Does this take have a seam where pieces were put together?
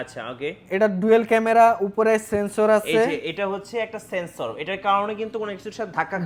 no; 0 cuts

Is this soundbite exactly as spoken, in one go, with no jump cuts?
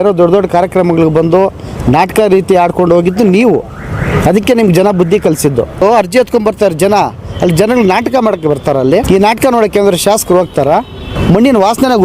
no; 3 cuts; at 5.8 s, 9.1 s, 11.1 s

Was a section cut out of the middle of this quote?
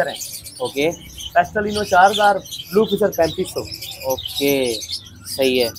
no; 0 cuts

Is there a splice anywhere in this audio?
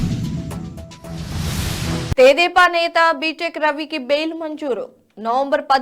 yes; 1 cut; at 2.1 s

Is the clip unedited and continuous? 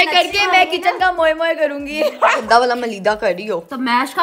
no; 1 cut; at 2.4 s

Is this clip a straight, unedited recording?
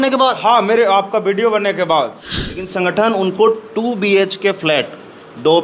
no; 1 cut; at 2.7 s

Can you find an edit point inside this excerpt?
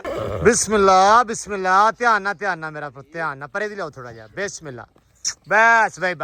no; 0 cuts

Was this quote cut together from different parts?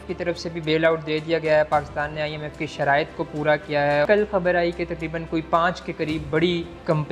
yes; 1 cut; at 4.1 s

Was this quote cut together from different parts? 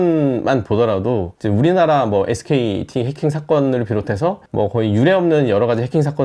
no; 0 cuts

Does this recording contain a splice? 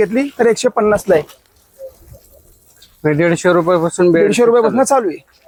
no; 0 cuts

